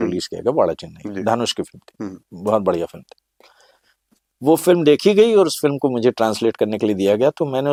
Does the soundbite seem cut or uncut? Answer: uncut